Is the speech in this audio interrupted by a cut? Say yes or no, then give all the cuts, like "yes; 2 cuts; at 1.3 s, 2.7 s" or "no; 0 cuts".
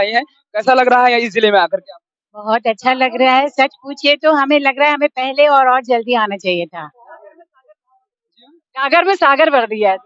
no; 0 cuts